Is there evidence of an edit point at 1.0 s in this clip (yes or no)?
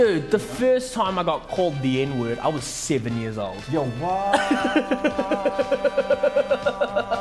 no